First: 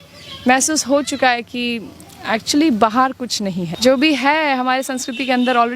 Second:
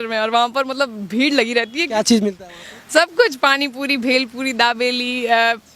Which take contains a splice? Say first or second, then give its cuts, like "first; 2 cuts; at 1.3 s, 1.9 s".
first; 1 cut; at 3.7 s